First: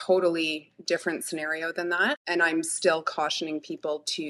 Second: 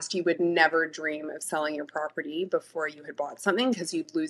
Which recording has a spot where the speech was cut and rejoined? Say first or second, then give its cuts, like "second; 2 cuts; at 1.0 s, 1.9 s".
first; 1 cut; at 2.2 s